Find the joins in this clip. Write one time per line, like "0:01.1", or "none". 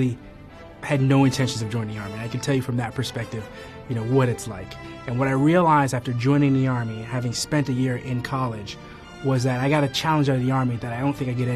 none